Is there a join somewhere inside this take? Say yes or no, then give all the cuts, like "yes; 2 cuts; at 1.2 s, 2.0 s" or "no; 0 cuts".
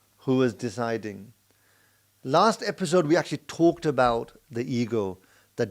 no; 0 cuts